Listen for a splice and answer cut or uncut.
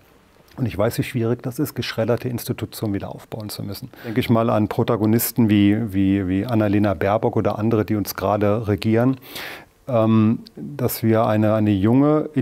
cut